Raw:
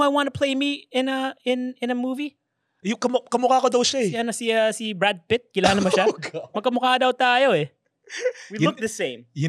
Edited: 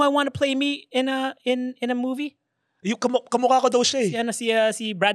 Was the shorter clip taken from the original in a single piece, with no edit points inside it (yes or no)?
yes